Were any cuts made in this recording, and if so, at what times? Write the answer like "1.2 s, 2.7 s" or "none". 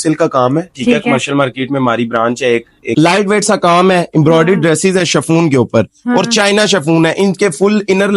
2.8 s